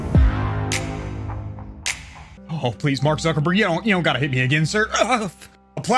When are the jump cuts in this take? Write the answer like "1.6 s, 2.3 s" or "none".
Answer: 2.3 s